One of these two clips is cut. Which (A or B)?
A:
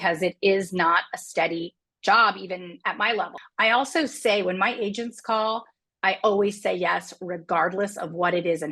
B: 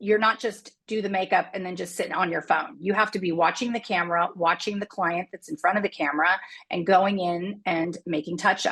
A